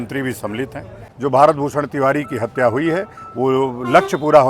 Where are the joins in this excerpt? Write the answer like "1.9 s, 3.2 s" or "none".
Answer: 1.0 s